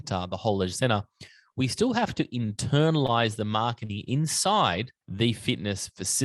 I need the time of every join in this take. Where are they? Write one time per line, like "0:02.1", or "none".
0:05.0